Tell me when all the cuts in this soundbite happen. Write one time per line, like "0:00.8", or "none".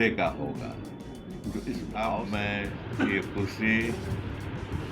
0:02.2